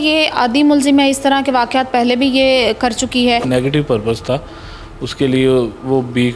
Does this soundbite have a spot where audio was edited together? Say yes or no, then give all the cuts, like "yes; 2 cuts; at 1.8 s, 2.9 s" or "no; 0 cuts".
yes; 1 cut; at 3.5 s